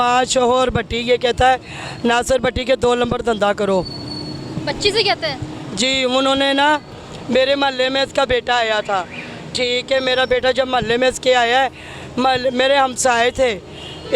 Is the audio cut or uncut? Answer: uncut